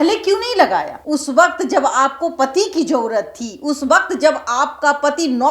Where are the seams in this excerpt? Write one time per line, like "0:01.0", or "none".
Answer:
0:01.0